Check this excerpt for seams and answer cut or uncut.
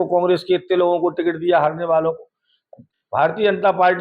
cut